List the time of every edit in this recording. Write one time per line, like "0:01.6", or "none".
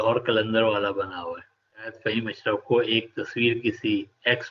0:02.0